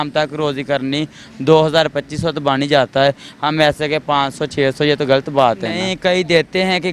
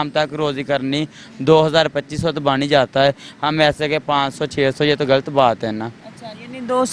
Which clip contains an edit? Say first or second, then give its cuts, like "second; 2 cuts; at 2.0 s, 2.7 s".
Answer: first; 1 cut; at 5.9 s